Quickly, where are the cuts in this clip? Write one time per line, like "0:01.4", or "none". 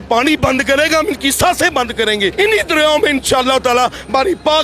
0:02.3